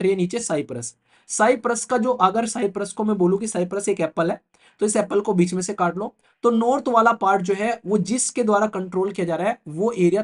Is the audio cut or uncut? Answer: uncut